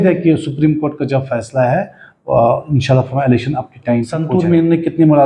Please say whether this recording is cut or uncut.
cut